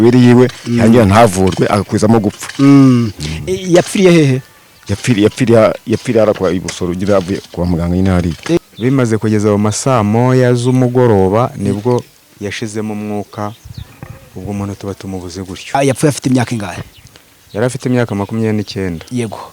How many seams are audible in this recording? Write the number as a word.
two